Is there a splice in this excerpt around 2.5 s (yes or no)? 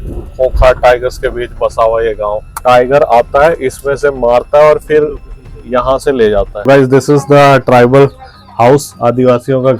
yes